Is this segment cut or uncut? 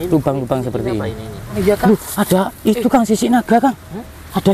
cut